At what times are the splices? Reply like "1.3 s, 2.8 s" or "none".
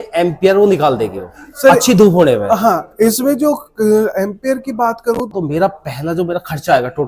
5.3 s